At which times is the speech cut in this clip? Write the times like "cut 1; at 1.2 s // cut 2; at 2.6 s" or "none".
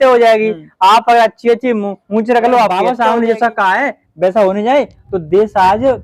cut 1; at 2.8 s